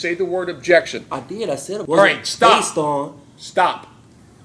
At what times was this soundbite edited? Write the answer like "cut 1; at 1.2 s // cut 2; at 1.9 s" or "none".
cut 1; at 1.7 s